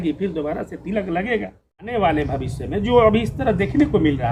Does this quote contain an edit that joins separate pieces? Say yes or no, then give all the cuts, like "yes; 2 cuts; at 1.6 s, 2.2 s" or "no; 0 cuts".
yes; 1 cut; at 1.9 s